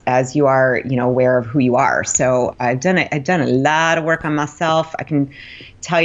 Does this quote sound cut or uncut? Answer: uncut